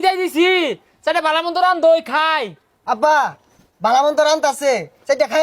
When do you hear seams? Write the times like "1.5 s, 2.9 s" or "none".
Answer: none